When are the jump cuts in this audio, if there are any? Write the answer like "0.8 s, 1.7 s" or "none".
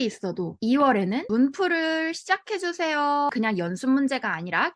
1.3 s, 3.3 s